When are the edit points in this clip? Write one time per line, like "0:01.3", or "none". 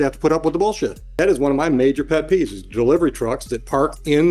0:01.0